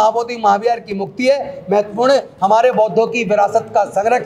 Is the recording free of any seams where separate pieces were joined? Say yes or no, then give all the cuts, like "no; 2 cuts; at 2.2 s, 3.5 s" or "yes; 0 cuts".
yes; 0 cuts